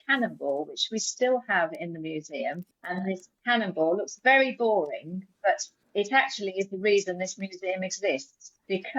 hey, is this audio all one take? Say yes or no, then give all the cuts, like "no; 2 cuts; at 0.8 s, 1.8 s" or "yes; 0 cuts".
no; 2 cuts; at 2.6 s, 5.7 s